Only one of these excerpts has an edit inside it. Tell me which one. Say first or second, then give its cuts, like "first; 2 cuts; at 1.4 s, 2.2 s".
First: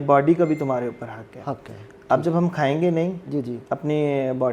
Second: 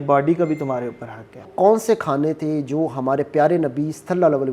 second; 1 cut; at 1.5 s